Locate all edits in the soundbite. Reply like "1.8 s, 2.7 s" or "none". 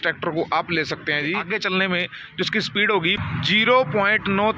1.4 s, 3.2 s